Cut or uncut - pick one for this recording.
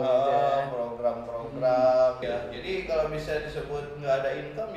cut